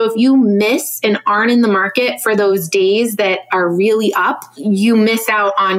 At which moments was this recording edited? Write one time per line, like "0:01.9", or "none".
0:04.5